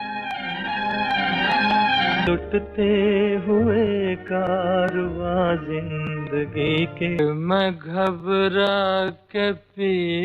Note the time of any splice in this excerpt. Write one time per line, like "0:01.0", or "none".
0:02.2